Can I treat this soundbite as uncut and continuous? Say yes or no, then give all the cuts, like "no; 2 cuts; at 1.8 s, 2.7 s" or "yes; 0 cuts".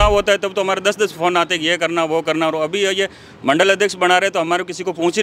yes; 0 cuts